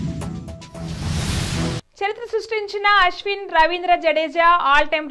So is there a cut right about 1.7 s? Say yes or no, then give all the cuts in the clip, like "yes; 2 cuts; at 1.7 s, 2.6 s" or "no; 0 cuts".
yes; 1 cut; at 1.7 s